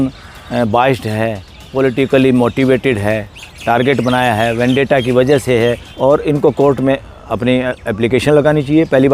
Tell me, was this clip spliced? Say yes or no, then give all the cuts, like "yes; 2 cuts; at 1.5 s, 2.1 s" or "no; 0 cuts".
yes; 1 cut; at 5.9 s